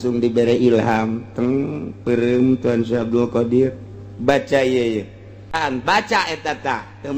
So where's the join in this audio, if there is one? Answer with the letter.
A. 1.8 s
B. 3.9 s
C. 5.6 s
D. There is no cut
C